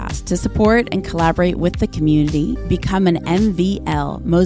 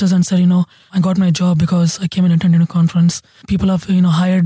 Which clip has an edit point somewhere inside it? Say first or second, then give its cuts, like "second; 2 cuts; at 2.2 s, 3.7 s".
second; 2 cuts; at 0.9 s, 3.4 s